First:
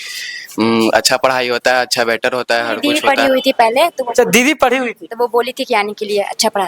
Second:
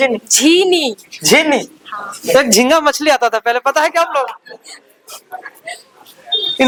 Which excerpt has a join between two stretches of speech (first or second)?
first